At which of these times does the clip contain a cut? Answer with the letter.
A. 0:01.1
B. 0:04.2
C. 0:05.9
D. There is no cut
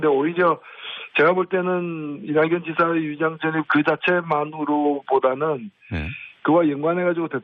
D